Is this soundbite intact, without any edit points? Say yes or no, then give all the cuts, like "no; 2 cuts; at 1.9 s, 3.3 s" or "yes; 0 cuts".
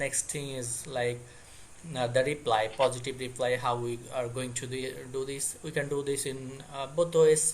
yes; 0 cuts